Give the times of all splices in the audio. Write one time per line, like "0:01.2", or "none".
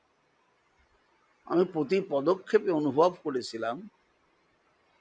none